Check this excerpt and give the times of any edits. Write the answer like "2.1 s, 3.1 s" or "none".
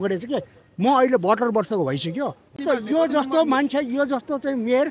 2.6 s

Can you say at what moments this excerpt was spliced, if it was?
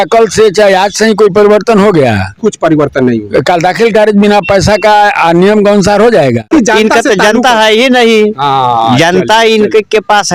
6.5 s

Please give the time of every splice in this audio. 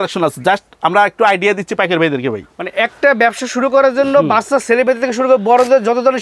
none

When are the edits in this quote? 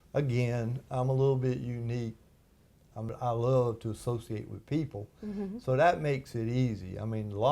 3.1 s

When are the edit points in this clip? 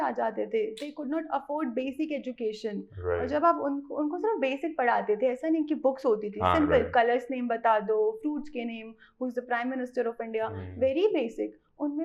none

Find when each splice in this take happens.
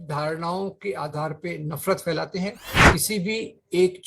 2.7 s

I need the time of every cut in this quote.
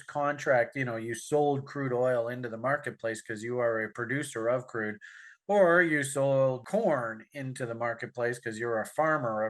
none

